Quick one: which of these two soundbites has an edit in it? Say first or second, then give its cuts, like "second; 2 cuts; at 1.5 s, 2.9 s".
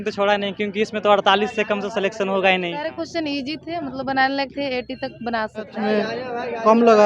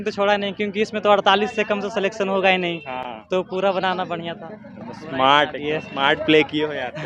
first; 2 cuts; at 2.8 s, 5.8 s